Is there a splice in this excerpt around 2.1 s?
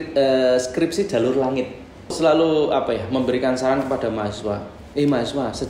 yes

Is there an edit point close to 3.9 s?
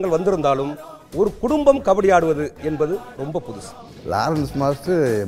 yes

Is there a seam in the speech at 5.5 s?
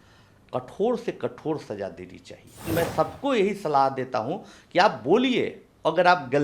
no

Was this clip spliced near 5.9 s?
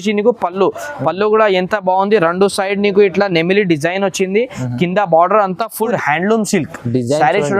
yes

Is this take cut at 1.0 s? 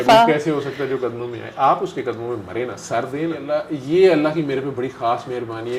no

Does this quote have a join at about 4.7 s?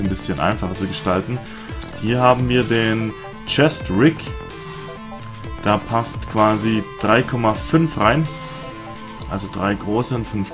no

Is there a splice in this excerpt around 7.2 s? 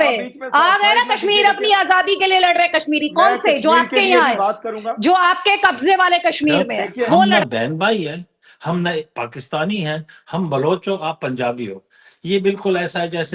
yes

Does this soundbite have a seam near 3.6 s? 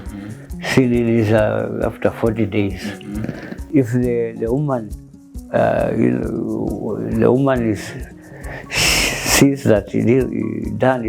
yes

